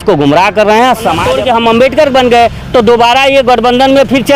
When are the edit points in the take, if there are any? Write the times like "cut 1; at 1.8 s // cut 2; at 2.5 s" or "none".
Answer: cut 1; at 1.2 s